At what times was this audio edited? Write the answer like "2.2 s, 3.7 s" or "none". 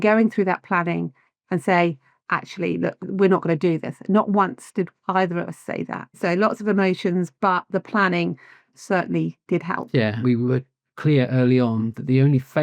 3.0 s, 6.2 s, 8.7 s, 10.2 s